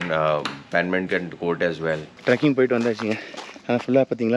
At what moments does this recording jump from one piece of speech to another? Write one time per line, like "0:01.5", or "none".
0:02.1